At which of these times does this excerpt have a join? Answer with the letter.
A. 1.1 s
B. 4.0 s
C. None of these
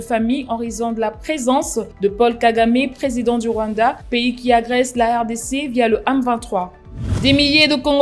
C